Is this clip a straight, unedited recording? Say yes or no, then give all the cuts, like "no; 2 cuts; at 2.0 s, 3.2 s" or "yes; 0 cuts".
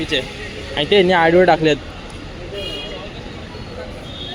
yes; 0 cuts